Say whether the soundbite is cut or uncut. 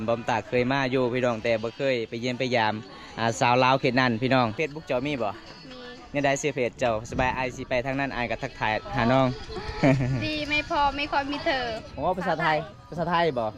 cut